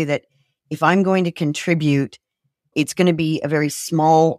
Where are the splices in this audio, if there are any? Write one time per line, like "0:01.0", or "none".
0:02.7